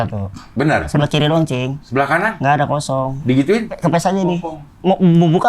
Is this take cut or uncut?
cut